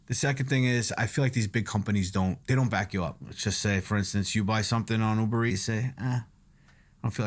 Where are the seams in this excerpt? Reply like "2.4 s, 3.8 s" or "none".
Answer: 2.4 s, 3.3 s, 5.5 s